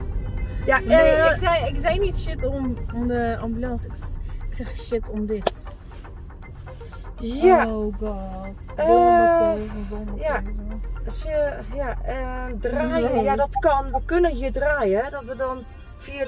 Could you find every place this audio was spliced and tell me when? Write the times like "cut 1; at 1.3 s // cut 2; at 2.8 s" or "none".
none